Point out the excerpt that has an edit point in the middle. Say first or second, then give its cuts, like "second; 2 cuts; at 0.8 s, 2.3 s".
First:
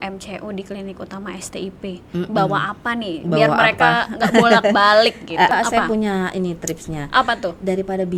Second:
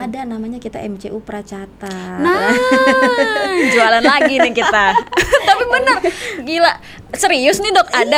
first; 1 cut; at 5.5 s